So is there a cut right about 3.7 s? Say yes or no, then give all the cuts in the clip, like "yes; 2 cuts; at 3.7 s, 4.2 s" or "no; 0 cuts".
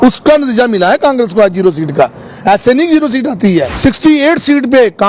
yes; 1 cut; at 3.7 s